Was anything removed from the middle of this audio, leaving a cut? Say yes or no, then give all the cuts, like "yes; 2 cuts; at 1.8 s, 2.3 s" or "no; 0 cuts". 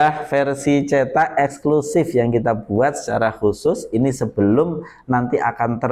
no; 0 cuts